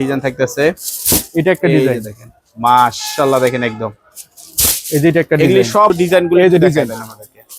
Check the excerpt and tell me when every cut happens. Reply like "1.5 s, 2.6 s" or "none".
5.9 s